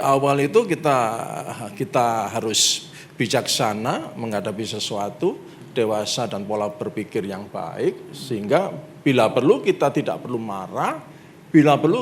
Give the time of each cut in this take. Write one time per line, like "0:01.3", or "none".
none